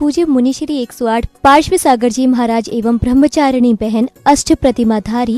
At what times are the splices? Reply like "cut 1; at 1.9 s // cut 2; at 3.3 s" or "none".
none